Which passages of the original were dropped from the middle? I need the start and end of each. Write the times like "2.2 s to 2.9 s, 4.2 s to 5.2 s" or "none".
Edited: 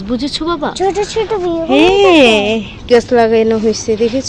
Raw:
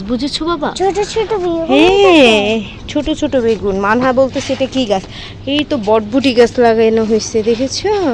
2.9 s to 6.3 s

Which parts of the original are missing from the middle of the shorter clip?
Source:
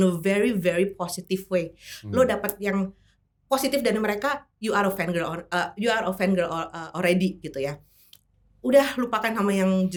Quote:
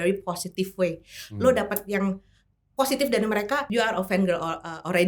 4.4 s to 5.7 s

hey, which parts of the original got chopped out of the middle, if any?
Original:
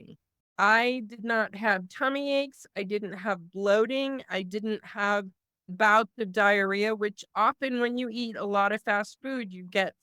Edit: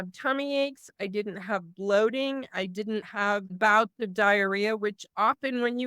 4.9 s to 5.4 s

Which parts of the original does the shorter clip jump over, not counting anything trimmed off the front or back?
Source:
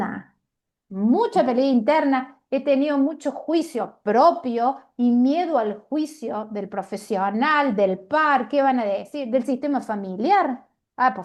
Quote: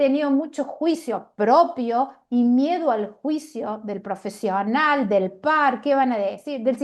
none

